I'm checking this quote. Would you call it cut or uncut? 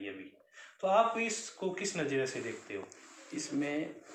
uncut